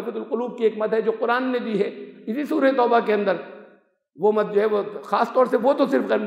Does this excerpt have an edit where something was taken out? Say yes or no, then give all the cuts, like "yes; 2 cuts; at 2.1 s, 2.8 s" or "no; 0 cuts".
no; 0 cuts